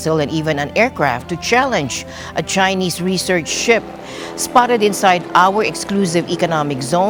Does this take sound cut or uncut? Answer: uncut